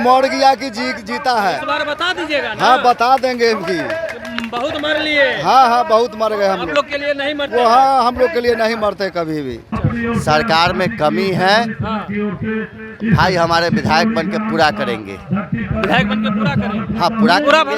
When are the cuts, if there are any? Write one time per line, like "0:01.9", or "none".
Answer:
0:09.6

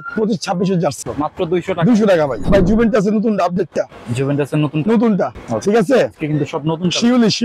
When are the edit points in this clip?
0:01.0
0:02.4
0:05.4

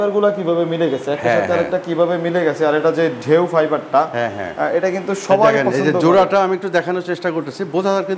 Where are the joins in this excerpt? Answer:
none

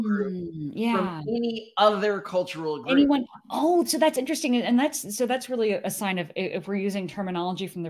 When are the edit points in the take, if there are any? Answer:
none

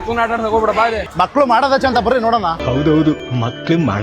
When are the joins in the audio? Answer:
0:01.0

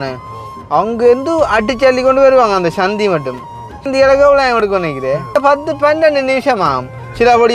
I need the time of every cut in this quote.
0:03.9
0:05.3

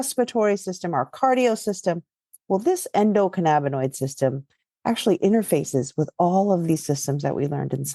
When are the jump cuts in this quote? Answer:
none

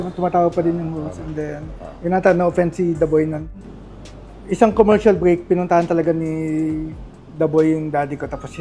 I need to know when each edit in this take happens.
0:03.6

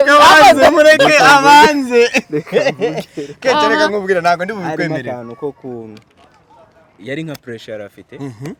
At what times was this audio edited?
none

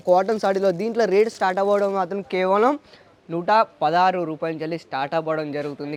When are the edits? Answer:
none

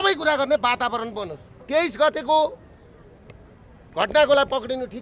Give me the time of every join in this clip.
0:01.6

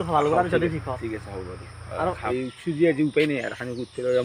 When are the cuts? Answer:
0:02.3

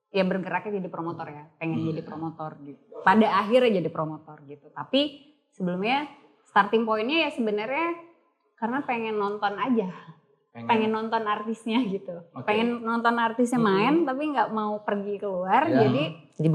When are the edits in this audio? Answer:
none

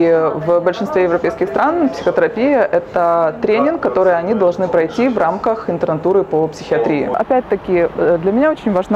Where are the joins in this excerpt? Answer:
0:07.1

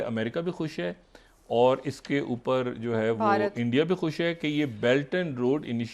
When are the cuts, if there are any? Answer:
none

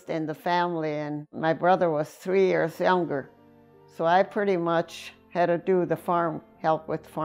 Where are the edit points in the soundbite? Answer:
none

